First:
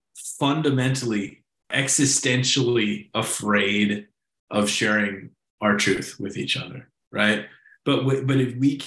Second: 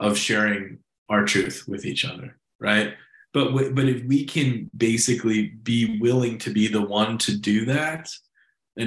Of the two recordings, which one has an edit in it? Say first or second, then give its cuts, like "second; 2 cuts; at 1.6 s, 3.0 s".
first; 1 cut; at 1.7 s